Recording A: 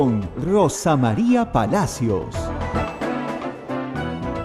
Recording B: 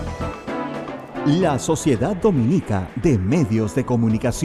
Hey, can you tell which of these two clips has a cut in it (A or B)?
B